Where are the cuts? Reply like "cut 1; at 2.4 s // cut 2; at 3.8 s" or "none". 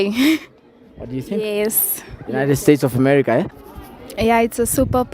cut 1; at 3.6 s